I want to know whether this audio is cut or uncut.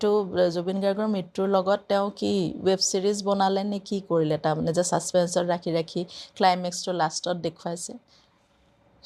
uncut